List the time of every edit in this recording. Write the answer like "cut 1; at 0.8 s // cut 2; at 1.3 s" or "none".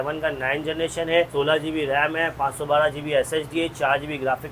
none